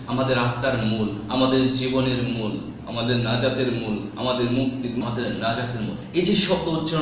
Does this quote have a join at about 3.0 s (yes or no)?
no